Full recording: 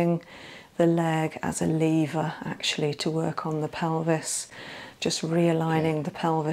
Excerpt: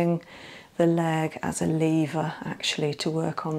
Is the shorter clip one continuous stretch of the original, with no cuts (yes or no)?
yes